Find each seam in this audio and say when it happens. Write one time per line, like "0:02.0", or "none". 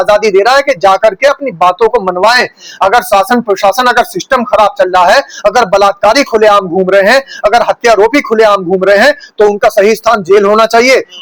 none